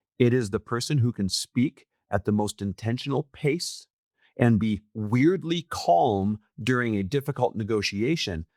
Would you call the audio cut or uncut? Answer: uncut